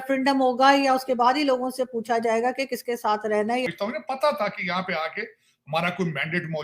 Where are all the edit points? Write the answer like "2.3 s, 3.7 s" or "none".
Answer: 3.7 s